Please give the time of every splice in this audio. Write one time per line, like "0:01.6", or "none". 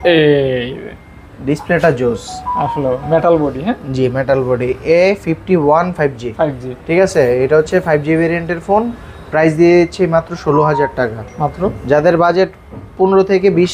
none